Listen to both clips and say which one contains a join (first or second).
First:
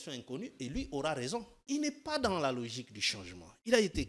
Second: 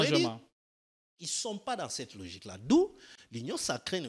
first